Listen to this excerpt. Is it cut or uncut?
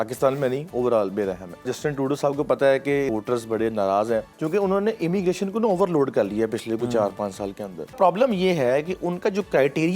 cut